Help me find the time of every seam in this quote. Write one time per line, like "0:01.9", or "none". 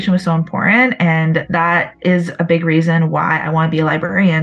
0:01.5